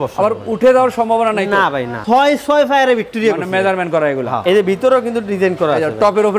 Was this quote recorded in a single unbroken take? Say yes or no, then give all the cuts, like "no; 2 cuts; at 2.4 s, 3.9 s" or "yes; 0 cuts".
no; 2 cuts; at 2.0 s, 4.4 s